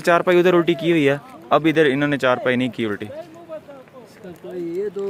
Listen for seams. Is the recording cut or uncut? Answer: uncut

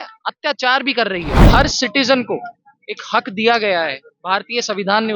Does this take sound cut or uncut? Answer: cut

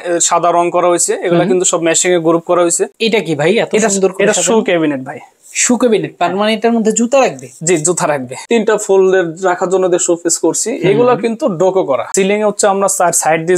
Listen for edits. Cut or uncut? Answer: cut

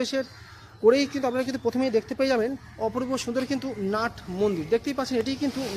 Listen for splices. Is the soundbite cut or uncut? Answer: uncut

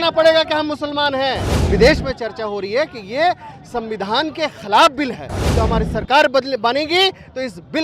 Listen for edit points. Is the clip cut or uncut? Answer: cut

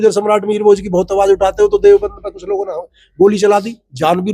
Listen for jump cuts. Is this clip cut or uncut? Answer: uncut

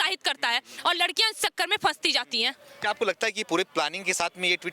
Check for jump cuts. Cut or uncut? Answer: uncut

